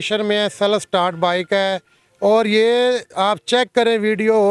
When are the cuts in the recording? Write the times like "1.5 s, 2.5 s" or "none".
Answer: none